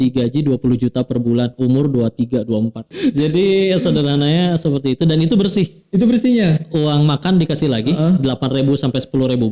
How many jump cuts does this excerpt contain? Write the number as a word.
one